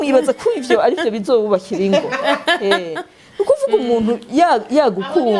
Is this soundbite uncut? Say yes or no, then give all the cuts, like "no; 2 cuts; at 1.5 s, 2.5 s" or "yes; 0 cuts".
yes; 0 cuts